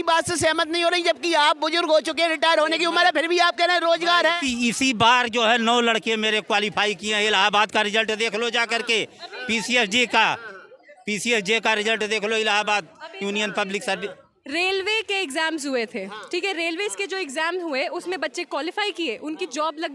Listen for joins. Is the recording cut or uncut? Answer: uncut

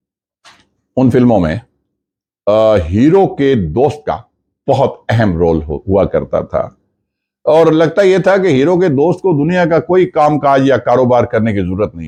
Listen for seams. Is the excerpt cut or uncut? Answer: uncut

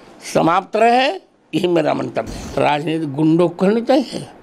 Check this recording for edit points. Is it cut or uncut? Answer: cut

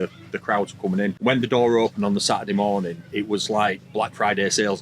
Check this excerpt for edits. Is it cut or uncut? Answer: cut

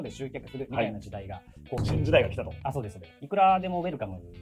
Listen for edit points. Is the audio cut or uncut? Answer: cut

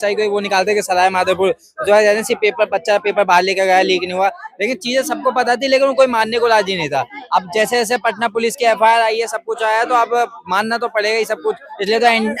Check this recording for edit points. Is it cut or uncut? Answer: uncut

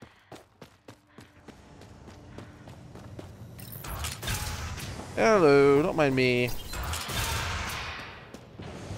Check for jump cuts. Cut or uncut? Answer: cut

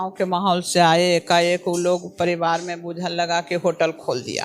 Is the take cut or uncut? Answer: uncut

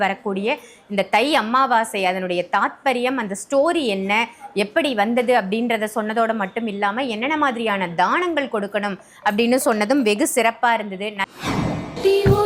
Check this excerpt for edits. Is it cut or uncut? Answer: cut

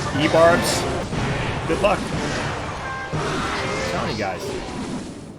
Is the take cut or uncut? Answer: cut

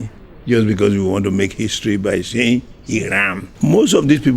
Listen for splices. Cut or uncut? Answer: cut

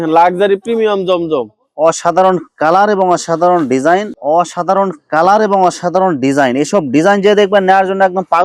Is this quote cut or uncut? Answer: cut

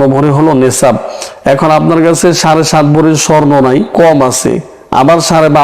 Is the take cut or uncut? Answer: cut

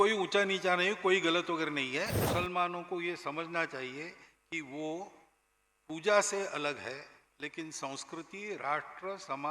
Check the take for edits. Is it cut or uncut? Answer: cut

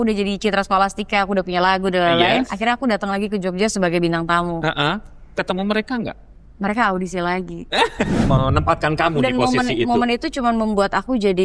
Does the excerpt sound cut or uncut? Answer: cut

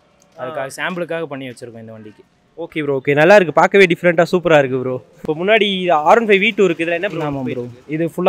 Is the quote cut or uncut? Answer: cut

